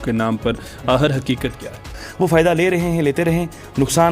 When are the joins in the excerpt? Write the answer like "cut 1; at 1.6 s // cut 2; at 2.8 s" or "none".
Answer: cut 1; at 1.8 s